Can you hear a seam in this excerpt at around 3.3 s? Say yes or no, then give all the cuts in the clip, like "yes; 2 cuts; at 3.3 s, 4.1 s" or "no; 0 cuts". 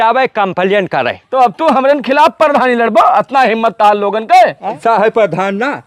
no; 2 cuts; at 1.2 s, 4.7 s